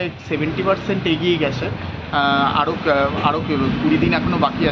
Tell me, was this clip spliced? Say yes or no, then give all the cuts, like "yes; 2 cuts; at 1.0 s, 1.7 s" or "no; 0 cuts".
no; 0 cuts